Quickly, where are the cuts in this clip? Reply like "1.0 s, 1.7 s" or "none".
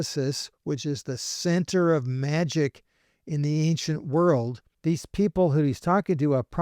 4.7 s